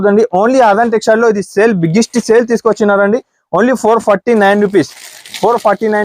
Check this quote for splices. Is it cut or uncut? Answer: uncut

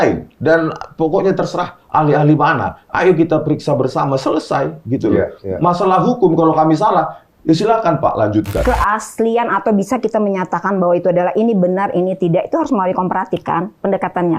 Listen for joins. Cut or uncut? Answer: cut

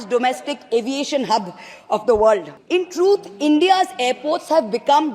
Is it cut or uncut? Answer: cut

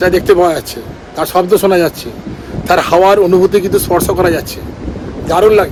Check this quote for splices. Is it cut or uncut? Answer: uncut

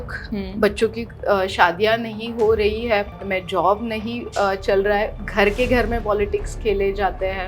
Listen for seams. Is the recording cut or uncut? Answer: cut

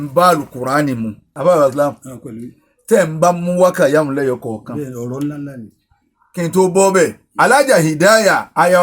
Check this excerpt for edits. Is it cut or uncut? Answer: cut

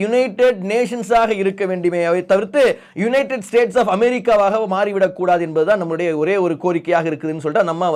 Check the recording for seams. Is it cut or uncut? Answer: uncut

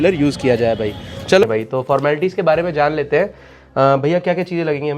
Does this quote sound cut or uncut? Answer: cut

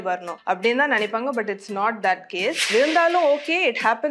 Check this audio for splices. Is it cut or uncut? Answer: cut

